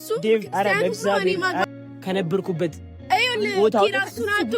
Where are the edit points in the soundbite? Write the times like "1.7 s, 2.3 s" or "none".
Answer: 1.6 s